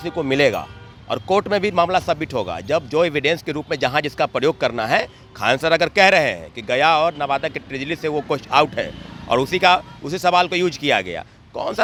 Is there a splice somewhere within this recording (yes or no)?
no